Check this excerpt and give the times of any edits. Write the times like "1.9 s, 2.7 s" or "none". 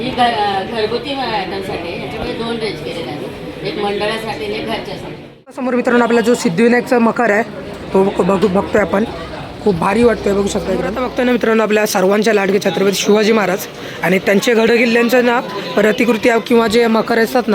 5.6 s, 11.0 s